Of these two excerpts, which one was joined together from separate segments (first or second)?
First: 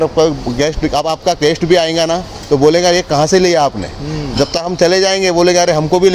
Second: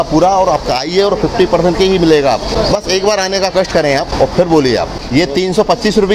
second